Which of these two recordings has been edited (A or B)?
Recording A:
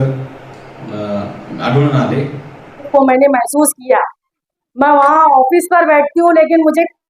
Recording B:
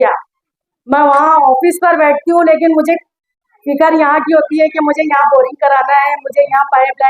A